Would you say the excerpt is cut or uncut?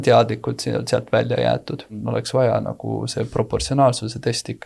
cut